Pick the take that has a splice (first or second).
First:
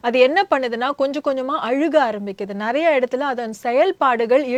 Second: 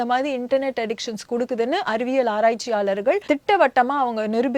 second